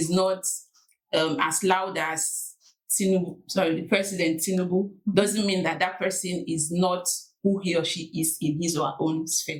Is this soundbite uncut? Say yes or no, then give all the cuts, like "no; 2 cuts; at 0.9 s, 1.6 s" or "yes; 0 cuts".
yes; 0 cuts